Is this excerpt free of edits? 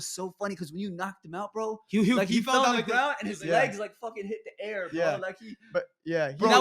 yes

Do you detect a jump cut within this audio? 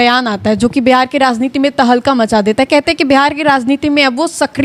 no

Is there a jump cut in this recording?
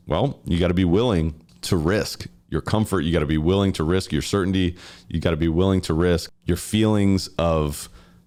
no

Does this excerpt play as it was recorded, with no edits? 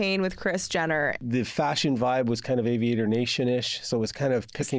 no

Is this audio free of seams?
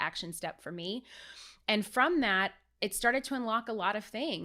yes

